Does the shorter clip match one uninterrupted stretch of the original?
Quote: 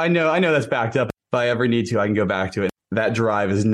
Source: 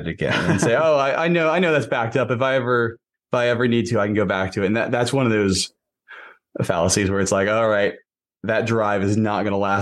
no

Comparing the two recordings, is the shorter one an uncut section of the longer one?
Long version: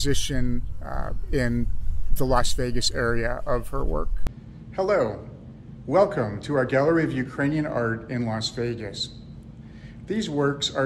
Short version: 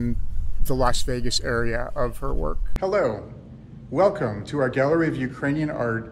no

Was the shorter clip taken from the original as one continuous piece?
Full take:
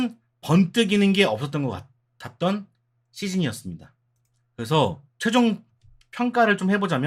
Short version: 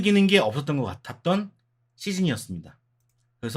no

